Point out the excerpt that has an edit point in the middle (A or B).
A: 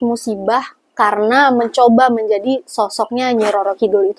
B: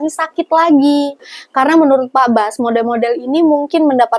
B